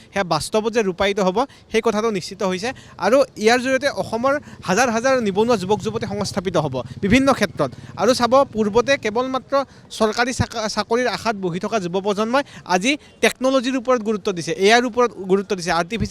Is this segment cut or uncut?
uncut